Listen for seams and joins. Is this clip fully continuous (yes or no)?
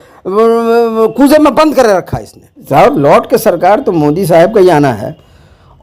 no